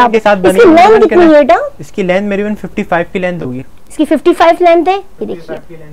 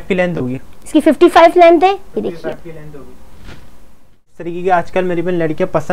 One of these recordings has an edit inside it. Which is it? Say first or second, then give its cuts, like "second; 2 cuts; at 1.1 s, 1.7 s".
second; 1 cut; at 4.4 s